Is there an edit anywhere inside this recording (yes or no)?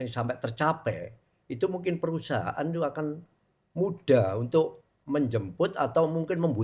no